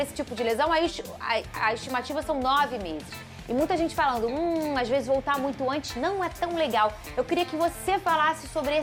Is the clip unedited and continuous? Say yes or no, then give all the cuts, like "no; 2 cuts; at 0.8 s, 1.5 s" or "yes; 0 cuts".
yes; 0 cuts